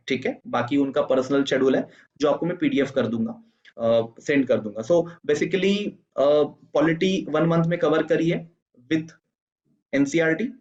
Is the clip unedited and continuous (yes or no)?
yes